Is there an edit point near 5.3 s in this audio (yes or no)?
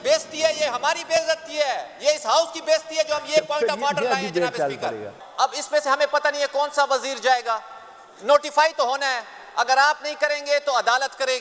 no